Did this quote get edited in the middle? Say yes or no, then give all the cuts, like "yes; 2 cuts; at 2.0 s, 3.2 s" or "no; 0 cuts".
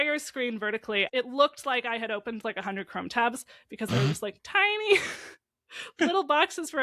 yes; 1 cut; at 1.1 s